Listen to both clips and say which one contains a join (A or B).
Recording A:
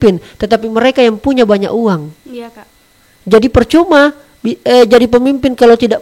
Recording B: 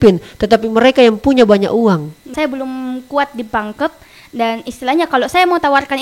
B